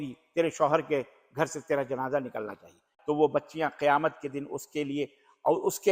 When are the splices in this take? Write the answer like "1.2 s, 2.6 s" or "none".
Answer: 2.9 s